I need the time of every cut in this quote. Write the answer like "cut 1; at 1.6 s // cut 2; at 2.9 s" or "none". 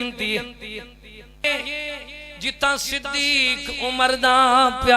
cut 1; at 1.4 s